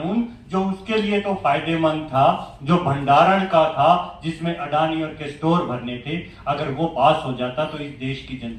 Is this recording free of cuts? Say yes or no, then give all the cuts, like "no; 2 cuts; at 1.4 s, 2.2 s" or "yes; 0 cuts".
yes; 0 cuts